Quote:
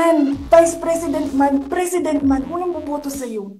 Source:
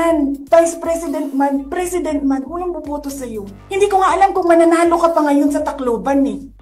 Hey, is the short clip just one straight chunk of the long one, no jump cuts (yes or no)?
yes